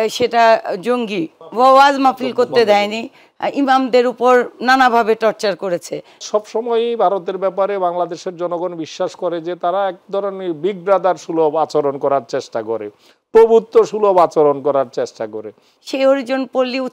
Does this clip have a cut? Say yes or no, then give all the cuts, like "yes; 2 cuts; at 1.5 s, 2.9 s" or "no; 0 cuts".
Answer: yes; 3 cuts; at 1.4 s, 6.2 s, 15.7 s